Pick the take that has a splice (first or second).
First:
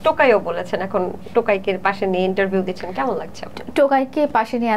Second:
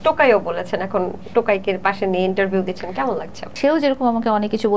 second